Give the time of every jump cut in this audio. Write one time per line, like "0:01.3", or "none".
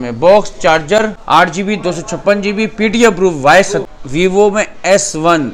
0:01.2
0:03.8